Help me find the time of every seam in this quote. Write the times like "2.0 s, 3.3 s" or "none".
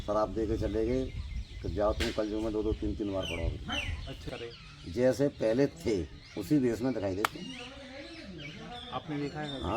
4.3 s